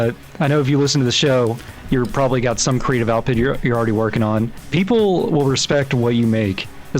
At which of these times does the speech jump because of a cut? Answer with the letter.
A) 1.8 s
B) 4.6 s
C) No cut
B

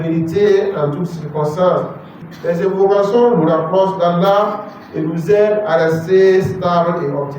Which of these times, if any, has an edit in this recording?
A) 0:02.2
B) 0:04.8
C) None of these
A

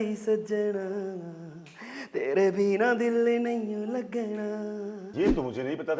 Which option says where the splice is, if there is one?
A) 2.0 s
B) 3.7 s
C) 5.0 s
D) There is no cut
C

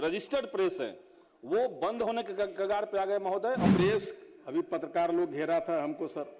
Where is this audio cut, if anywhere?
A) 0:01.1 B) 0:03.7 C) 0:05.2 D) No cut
B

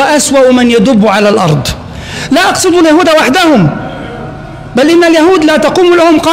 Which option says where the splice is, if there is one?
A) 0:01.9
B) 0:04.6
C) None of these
C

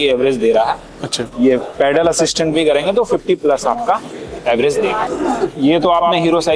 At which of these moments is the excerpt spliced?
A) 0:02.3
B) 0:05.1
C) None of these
B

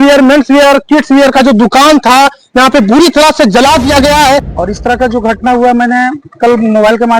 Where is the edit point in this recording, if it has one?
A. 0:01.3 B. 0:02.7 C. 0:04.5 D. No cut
C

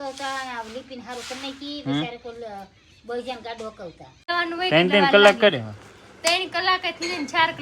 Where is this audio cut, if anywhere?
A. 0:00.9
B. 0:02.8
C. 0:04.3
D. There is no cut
C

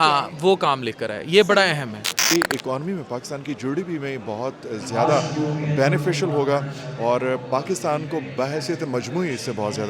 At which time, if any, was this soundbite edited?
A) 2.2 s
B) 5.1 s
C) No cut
A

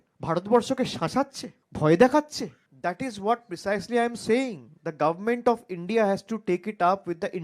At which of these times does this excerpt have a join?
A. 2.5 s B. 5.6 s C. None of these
A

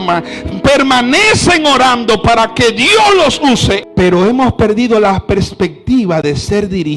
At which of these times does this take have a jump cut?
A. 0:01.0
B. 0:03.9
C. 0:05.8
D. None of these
B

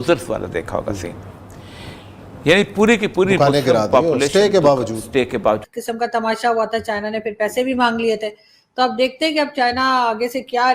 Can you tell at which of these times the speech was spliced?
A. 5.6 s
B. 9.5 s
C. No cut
A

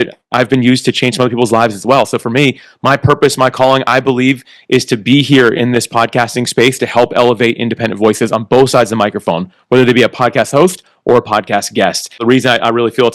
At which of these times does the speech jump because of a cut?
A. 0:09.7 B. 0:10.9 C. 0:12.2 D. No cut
C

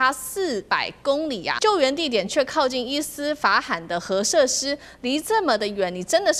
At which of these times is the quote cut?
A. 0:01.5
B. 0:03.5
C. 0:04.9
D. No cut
A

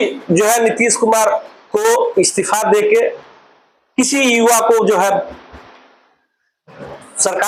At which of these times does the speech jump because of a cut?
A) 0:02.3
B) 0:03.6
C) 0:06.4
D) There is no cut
D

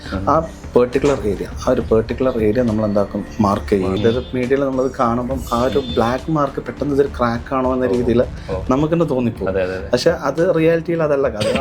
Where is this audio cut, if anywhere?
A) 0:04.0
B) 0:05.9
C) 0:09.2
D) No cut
A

